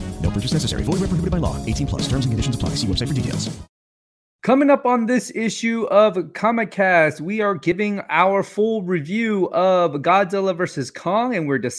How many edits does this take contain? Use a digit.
1